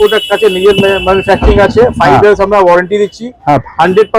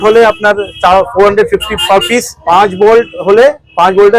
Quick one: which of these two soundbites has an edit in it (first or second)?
second